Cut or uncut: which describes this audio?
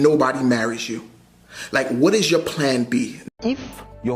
cut